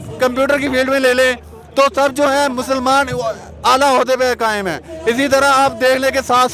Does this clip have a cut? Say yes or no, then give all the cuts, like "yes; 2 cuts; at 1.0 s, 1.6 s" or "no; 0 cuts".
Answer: no; 0 cuts